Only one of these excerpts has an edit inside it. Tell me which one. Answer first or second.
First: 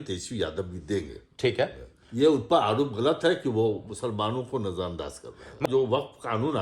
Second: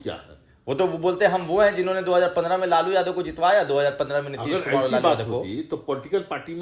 first